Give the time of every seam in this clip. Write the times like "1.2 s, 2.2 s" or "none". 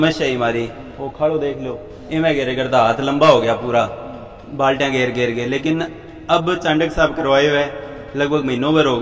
none

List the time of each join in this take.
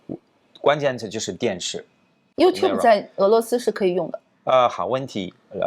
2.2 s

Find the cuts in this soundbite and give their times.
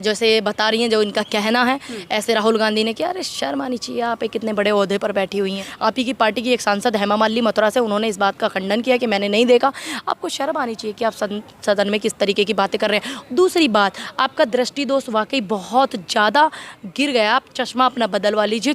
5.7 s

